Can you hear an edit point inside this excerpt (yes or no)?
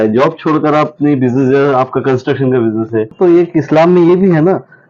yes